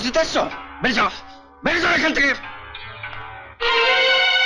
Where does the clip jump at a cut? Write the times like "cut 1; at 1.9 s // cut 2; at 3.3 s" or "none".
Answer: none